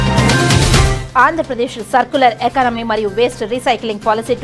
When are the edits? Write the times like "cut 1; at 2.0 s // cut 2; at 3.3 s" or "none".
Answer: cut 1; at 1.0 s